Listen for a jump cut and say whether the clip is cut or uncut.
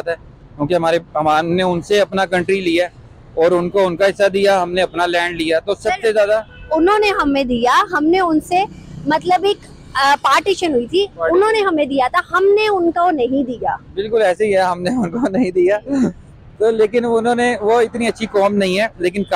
uncut